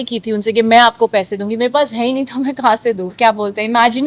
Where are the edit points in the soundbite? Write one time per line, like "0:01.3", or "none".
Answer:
0:03.1